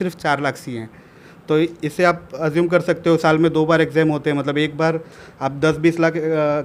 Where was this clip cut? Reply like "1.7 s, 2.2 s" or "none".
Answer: none